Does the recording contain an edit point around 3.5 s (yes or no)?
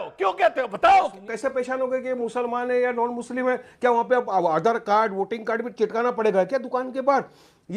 no